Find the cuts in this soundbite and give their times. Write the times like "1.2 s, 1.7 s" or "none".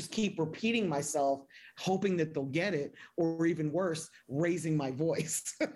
none